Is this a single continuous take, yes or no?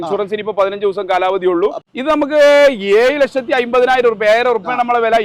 no